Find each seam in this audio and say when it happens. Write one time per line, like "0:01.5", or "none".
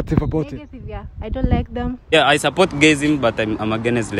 0:02.1